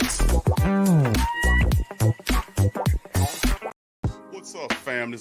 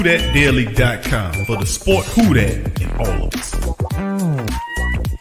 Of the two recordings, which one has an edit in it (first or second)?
first